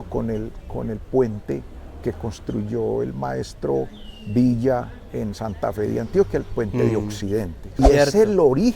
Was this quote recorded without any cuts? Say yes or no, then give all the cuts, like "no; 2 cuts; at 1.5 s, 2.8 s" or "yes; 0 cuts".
no; 1 cut; at 7.8 s